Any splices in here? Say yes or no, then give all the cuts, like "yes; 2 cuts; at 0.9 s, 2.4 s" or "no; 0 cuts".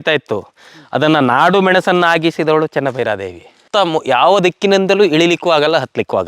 yes; 1 cut; at 3.6 s